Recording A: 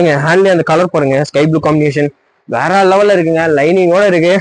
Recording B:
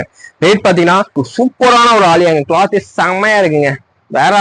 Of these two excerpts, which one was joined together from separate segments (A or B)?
B